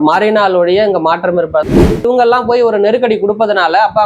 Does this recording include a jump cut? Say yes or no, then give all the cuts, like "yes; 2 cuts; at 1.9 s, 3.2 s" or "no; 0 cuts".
yes; 1 cut; at 1.8 s